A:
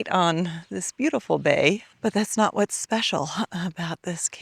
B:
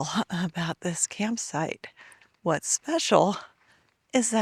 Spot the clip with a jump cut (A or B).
A